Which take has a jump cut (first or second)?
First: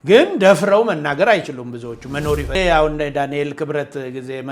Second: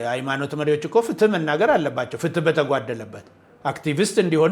first